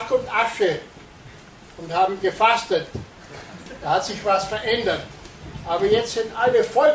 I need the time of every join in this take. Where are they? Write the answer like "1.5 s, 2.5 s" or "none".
none